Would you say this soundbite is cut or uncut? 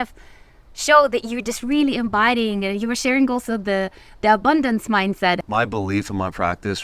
cut